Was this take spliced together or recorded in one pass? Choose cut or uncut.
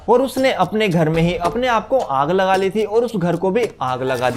uncut